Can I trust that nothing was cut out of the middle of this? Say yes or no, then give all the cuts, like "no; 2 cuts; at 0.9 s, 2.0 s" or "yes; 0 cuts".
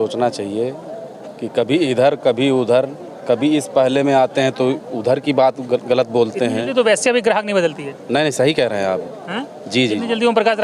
yes; 0 cuts